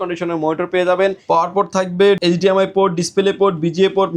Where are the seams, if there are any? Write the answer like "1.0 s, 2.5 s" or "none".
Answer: 1.2 s, 2.2 s